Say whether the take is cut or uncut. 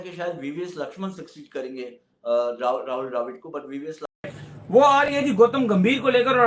cut